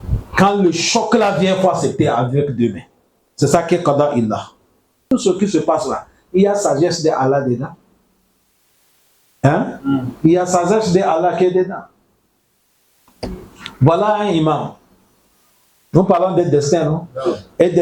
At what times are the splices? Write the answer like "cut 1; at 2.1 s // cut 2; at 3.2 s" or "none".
cut 1; at 5.0 s